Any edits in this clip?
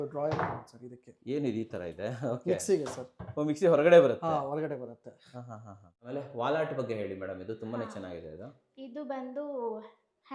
yes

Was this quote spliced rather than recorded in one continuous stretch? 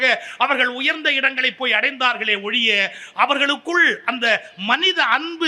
no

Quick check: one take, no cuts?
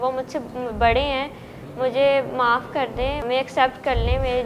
no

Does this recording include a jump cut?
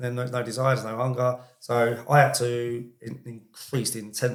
no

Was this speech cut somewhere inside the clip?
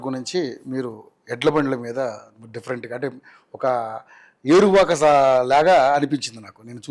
no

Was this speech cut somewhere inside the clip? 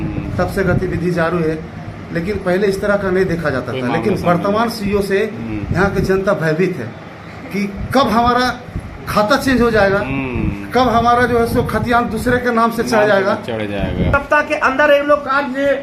yes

